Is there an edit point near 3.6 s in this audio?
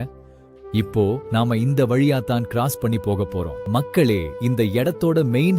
yes; 1 cut; at 3.6 s

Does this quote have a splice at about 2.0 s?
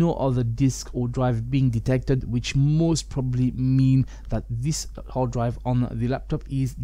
no; 0 cuts

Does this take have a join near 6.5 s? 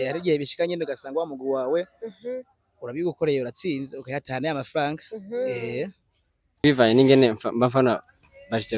yes; 1 cut; at 6.5 s

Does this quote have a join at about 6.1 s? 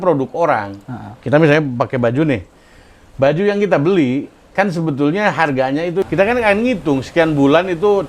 yes; 1 cut; at 6.1 s

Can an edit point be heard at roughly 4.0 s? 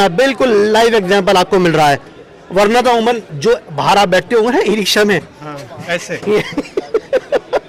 no; 0 cuts

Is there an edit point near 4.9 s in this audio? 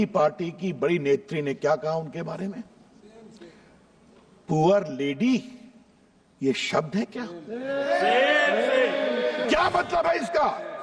no; 1 cut; at 9.4 s

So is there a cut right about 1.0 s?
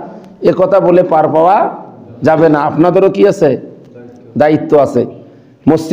no; 0 cuts

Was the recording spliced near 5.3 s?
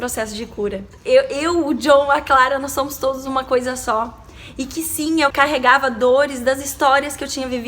yes; 2 cuts; at 0.9 s, 5.3 s

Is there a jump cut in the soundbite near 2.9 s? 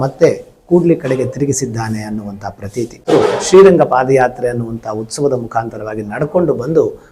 yes; 1 cut; at 2.9 s

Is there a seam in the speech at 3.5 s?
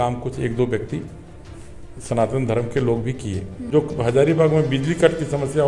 yes; 1 cut; at 3.5 s

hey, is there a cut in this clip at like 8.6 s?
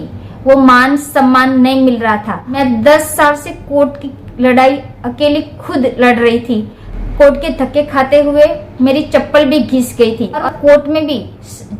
no; 3 cuts; at 2.5 s, 6.8 s, 10.4 s

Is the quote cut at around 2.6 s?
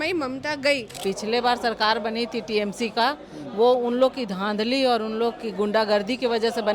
no; 1 cut; at 1.0 s

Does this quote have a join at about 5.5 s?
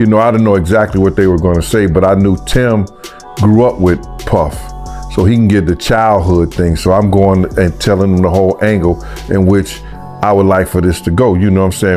no; 0 cuts

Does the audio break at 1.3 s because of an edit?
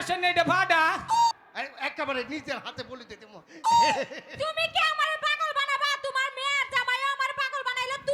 yes; 1 cut; at 1.3 s

